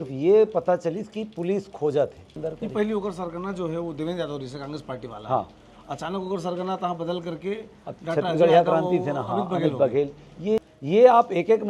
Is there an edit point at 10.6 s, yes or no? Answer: yes